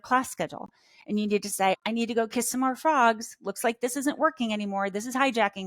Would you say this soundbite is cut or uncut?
cut